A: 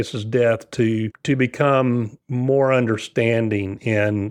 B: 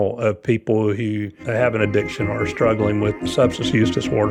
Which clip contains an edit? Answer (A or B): B